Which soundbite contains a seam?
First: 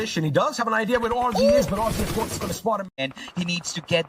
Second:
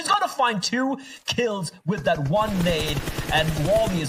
first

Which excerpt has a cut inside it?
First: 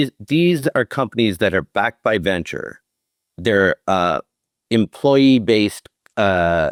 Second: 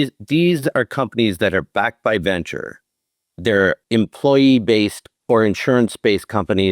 second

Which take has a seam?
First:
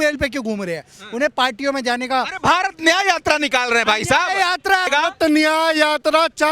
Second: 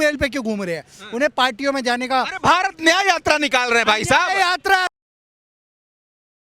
first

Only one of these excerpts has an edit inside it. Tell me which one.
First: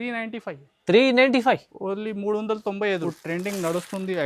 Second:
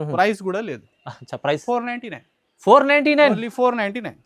first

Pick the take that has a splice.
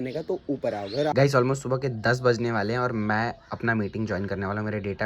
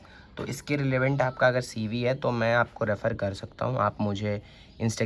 first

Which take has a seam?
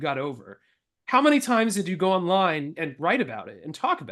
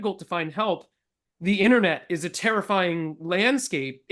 first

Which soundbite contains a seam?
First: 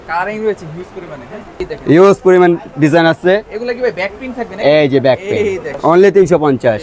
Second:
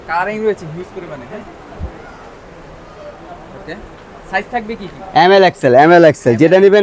first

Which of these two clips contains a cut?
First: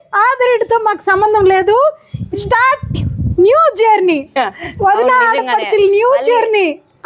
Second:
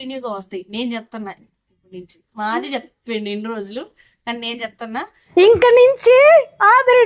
second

